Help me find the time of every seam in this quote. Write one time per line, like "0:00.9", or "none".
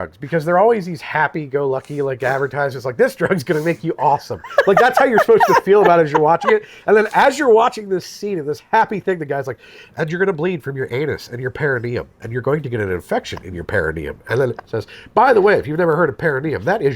none